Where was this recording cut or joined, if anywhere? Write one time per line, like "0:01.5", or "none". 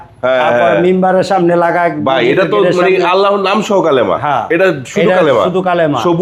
none